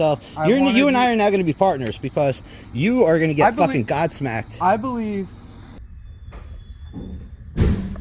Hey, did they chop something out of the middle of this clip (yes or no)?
yes